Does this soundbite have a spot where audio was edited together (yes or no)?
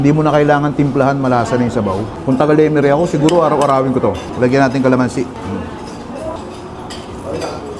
yes